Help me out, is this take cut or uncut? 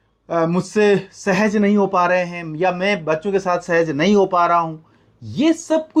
uncut